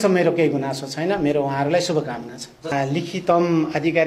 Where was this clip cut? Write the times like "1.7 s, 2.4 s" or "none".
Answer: 2.7 s